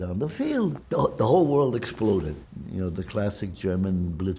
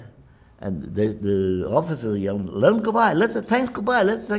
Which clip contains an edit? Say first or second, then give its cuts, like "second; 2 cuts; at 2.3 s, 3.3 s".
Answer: first; 2 cuts; at 0.8 s, 2.4 s